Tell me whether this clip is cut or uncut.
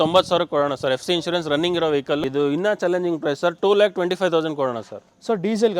cut